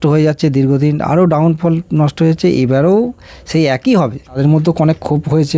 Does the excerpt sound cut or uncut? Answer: cut